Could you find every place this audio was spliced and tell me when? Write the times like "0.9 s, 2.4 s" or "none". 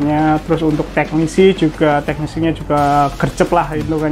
none